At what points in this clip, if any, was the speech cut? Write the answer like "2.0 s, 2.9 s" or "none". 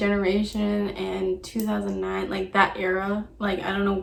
none